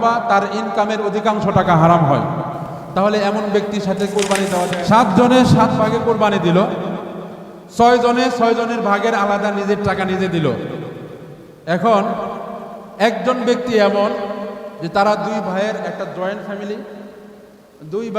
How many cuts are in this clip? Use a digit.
2